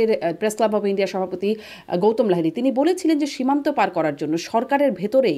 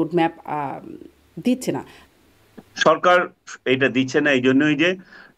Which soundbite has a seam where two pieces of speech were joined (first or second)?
second